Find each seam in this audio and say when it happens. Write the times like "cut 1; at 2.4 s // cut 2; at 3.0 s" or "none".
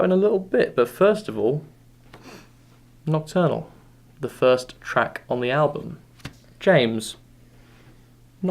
cut 1; at 2.2 s